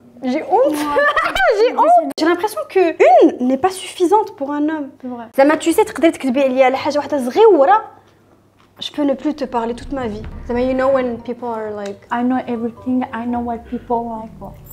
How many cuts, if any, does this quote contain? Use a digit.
3